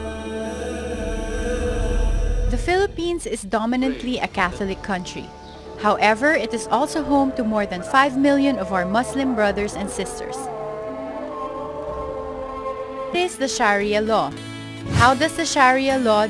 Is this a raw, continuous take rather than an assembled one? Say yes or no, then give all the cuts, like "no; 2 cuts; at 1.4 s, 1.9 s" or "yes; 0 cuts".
yes; 0 cuts